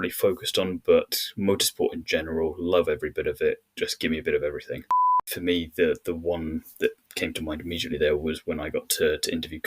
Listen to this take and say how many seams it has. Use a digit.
1